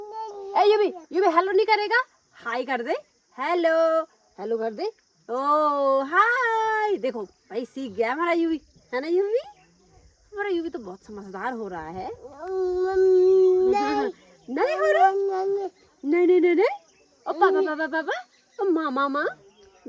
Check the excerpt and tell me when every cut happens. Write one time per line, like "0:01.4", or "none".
none